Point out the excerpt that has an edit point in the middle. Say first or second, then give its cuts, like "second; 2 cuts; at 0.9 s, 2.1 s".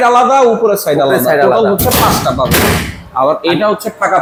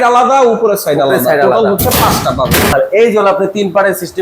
second; 1 cut; at 2.7 s